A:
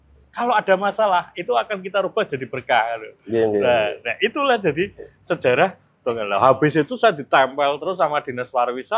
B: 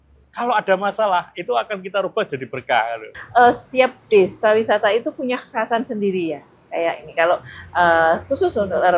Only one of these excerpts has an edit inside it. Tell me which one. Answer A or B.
B